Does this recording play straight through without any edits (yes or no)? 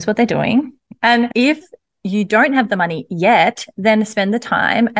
no